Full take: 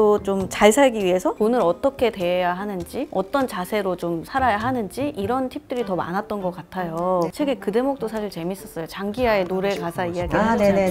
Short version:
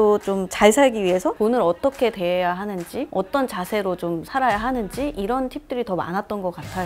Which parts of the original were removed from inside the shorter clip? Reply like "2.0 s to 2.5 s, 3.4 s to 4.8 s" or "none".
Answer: none